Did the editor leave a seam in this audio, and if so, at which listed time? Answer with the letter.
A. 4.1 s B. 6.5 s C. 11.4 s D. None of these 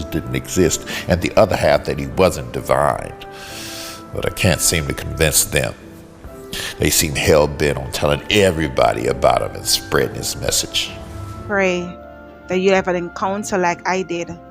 C